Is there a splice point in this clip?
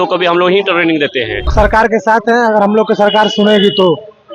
yes; 1 cut; at 1.5 s

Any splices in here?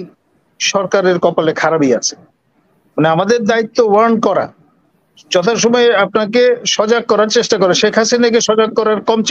no; 0 cuts

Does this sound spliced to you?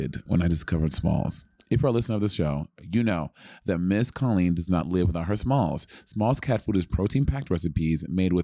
no; 0 cuts

